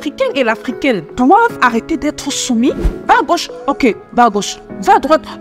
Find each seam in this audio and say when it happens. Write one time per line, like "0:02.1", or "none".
0:01.1
0:02.9